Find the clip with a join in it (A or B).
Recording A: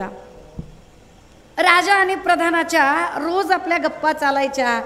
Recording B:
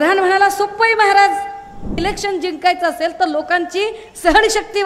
B